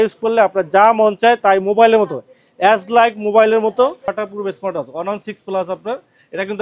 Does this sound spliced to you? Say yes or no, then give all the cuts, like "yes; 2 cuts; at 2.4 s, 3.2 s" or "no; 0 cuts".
yes; 1 cut; at 4.2 s